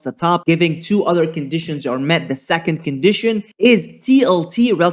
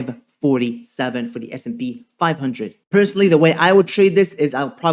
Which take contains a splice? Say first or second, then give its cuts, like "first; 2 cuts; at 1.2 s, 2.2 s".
second; 1 cut; at 2.7 s